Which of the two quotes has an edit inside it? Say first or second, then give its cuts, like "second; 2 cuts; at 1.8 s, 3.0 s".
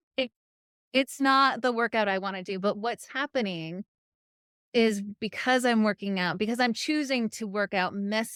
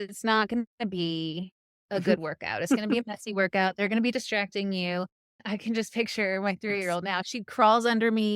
second; 2 cuts; at 5.4 s, 7.2 s